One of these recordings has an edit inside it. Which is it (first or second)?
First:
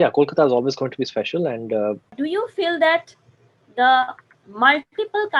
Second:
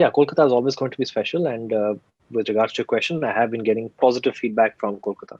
first